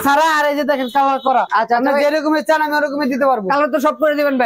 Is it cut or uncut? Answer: uncut